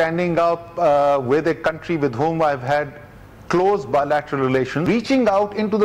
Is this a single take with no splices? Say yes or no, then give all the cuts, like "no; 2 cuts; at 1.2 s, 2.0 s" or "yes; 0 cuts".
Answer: no; 1 cut; at 4.8 s